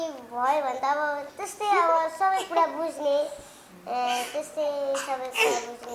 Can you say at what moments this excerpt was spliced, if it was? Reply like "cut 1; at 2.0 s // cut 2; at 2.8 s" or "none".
none